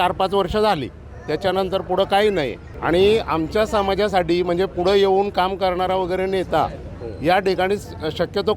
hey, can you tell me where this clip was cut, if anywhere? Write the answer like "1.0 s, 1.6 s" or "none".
none